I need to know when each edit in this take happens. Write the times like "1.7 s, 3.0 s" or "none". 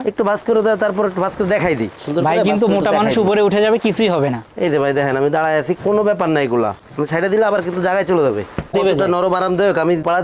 1.9 s, 6.8 s, 8.7 s